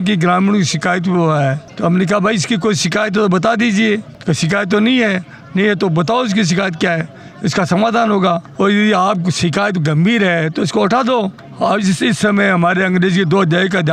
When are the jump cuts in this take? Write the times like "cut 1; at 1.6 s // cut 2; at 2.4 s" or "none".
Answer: none